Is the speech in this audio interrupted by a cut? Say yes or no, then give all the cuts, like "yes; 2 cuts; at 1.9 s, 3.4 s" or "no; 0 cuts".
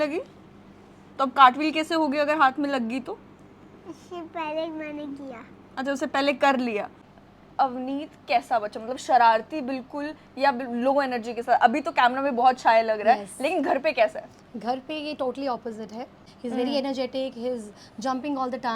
yes; 2 cuts; at 7.0 s, 16.2 s